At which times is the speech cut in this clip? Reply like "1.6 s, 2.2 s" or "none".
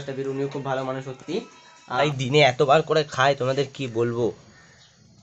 2.0 s